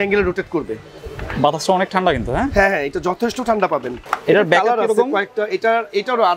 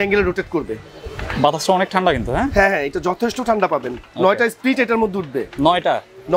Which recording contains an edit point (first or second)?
first